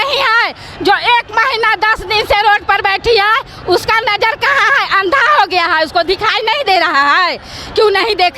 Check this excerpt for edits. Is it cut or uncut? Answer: uncut